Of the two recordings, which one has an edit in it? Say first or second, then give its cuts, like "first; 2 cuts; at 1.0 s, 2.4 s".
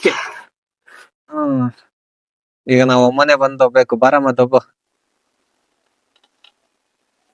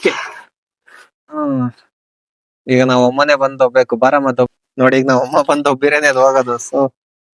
second; 1 cut; at 4.5 s